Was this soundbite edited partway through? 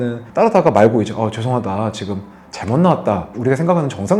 yes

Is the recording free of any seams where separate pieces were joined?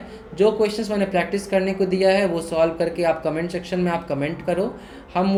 yes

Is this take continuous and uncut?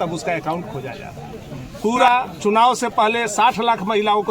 no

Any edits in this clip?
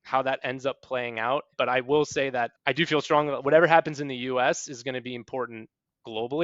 yes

